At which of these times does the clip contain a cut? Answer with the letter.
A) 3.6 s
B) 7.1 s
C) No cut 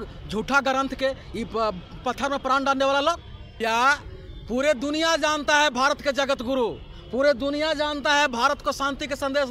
A